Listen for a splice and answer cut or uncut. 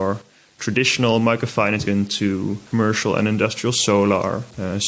cut